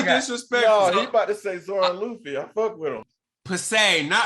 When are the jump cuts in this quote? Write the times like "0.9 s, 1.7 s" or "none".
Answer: 3.1 s